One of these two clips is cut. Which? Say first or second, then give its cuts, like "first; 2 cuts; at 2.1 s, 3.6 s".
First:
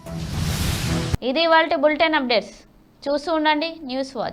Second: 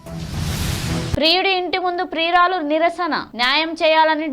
second; 1 cut; at 1.1 s